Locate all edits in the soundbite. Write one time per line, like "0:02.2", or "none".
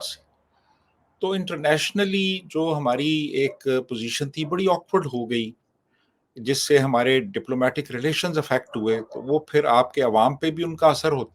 none